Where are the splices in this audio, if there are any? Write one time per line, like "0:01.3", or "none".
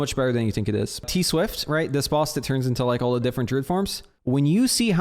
0:01.1
0:04.1